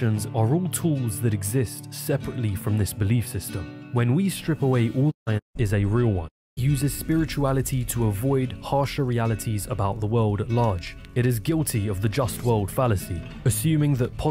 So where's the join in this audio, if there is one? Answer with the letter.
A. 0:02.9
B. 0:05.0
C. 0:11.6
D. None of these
D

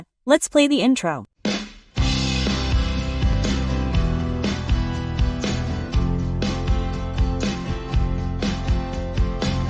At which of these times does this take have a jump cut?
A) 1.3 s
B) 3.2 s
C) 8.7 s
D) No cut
A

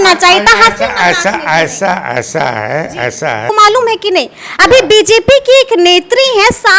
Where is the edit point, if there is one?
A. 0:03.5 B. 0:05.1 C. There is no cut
A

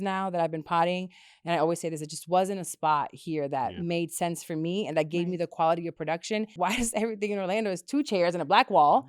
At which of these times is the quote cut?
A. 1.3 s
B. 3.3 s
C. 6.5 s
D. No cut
C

